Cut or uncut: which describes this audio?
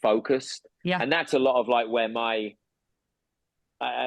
uncut